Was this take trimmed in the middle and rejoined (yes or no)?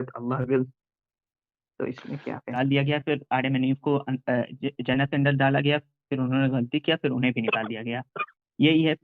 yes